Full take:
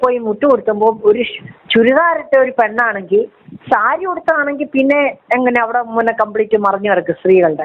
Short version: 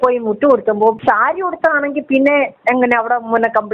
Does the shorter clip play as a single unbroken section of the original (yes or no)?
no